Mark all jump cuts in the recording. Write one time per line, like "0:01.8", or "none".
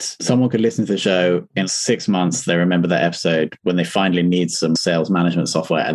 0:04.8